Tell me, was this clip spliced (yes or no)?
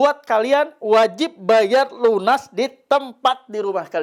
no